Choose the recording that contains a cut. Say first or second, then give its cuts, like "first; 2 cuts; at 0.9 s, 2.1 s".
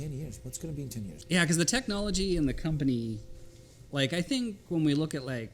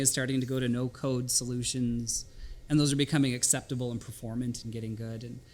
first; 1 cut; at 1.1 s